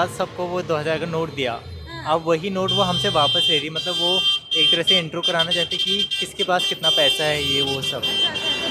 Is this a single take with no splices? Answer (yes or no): yes